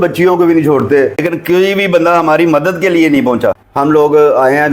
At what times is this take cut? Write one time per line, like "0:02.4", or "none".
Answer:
0:01.2
0:03.8